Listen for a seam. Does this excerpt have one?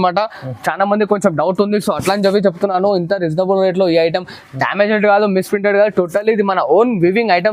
no; 0 cuts

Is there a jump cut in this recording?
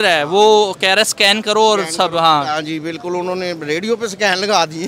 no; 0 cuts

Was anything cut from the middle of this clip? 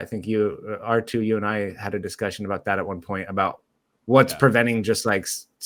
no; 0 cuts

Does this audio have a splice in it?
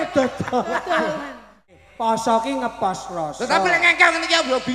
yes; 1 cut; at 1.7 s

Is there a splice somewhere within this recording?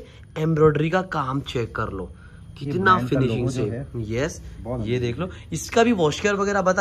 no; 0 cuts

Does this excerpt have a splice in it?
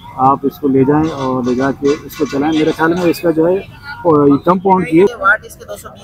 yes; 1 cut; at 5.2 s

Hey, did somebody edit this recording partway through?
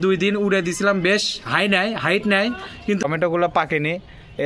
yes; 1 cut; at 3.0 s

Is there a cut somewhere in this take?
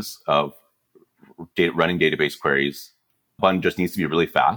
yes; 1 cut; at 3.3 s

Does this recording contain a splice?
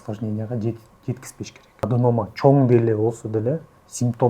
yes; 1 cut; at 1.9 s

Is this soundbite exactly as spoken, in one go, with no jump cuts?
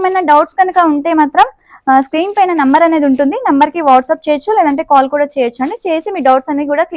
yes; 0 cuts

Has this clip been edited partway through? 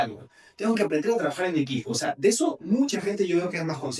no; 0 cuts

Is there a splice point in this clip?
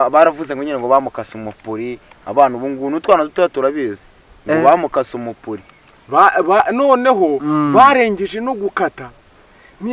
no; 0 cuts

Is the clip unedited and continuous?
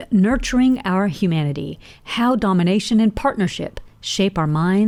yes; 0 cuts

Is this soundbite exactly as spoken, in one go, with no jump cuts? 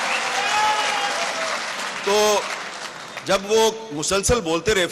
yes; 0 cuts

